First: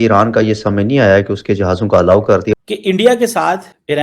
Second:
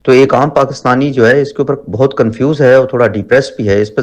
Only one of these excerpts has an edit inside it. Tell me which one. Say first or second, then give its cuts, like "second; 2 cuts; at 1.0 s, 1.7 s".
first; 1 cut; at 2.5 s